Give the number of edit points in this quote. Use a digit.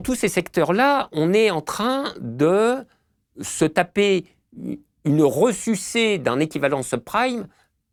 0